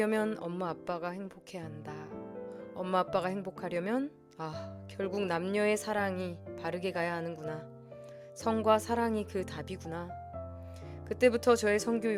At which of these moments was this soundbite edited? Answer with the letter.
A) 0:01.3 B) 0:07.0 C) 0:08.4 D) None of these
D